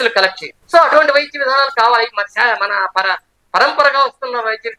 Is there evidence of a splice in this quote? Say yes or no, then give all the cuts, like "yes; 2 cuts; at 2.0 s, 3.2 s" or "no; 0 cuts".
no; 0 cuts